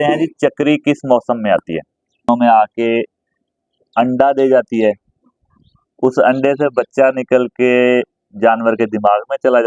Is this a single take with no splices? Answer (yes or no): no